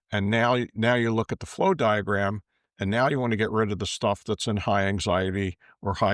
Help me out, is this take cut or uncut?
uncut